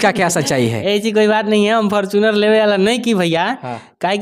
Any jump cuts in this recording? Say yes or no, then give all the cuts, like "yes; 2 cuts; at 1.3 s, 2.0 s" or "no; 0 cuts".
no; 0 cuts